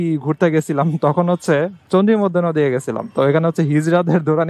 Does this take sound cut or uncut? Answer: uncut